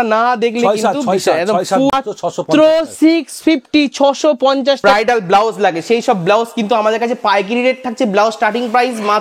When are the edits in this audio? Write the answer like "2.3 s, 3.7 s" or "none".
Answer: 1.9 s, 4.8 s